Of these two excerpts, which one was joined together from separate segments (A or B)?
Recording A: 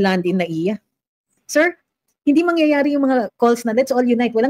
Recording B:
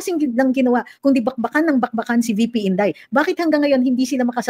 A